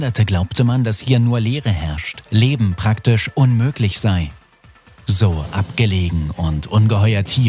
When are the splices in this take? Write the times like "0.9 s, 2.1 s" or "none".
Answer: none